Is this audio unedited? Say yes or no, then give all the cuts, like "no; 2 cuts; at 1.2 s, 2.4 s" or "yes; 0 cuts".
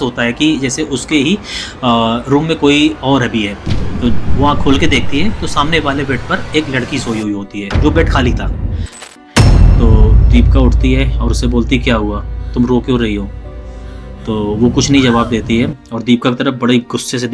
no; 1 cut; at 9.0 s